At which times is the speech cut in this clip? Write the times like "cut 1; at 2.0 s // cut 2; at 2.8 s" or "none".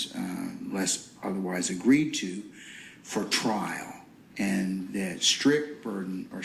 cut 1; at 5.1 s